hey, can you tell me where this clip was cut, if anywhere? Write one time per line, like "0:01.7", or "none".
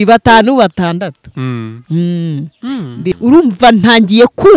0:03.1